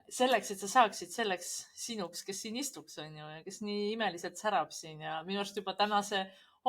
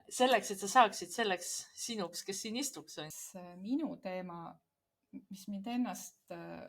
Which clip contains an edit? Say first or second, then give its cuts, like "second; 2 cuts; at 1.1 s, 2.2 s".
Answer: second; 1 cut; at 3.1 s